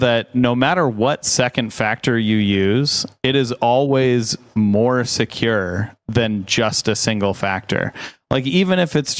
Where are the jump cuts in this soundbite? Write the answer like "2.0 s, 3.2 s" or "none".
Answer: none